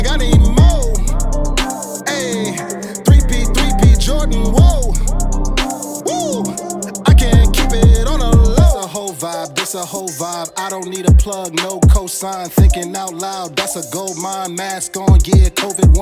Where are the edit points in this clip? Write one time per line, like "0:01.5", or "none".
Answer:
none